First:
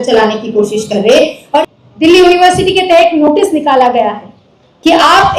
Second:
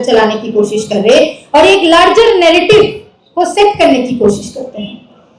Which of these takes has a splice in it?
first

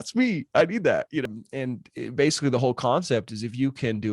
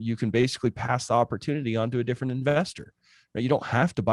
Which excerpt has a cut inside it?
first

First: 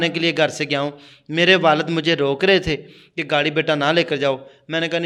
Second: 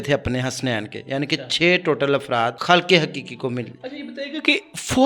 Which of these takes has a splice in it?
second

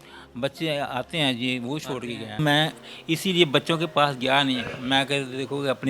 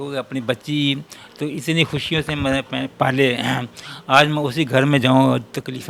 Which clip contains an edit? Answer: first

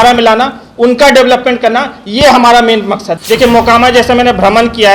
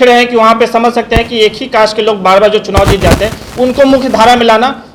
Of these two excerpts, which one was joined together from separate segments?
first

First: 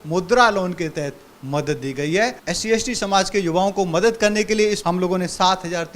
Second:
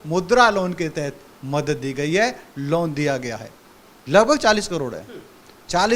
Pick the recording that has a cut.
first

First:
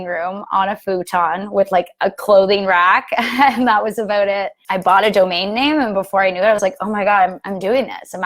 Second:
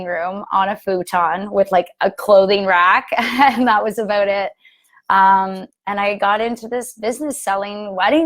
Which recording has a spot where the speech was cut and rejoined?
first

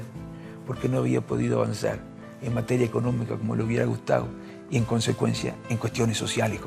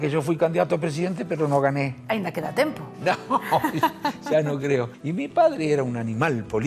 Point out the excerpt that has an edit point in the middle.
second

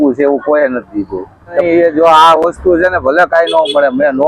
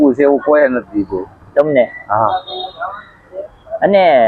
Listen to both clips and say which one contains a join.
first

